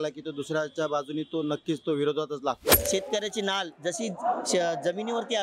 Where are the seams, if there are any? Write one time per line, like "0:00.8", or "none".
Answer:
0:02.7